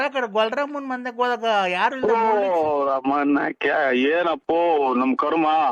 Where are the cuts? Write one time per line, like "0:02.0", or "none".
none